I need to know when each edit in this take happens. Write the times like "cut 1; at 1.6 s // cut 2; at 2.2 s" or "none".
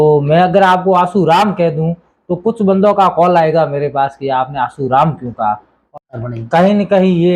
cut 1; at 5.8 s